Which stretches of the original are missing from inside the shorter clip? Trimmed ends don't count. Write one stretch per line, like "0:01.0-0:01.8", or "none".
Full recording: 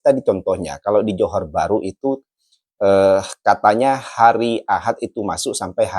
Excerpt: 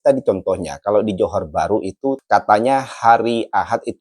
0:02.2-0:03.4